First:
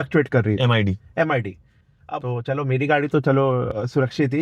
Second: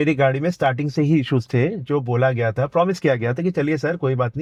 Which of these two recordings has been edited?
first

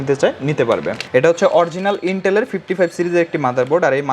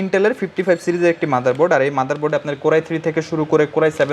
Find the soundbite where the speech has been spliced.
first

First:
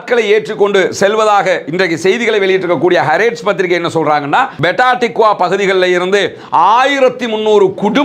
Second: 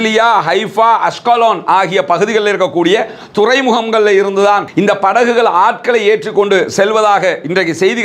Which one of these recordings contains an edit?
first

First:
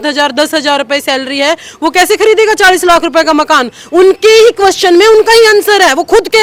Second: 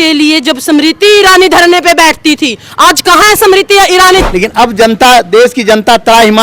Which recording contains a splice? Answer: second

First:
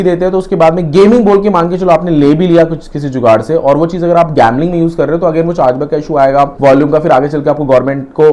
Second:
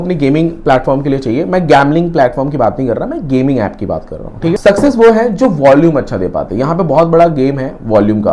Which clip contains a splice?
second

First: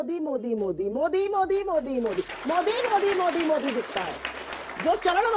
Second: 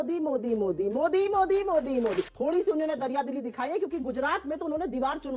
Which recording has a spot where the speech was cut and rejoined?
second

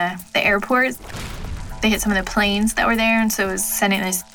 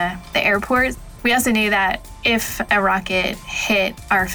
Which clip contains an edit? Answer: second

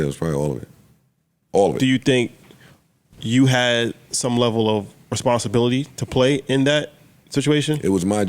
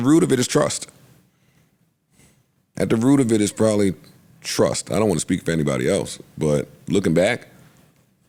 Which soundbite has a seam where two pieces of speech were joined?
first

